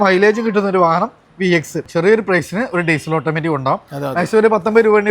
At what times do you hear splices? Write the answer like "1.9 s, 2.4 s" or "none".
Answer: 1.9 s